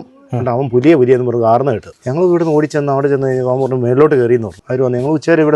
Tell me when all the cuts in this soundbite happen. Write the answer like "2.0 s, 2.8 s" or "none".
1.9 s, 4.6 s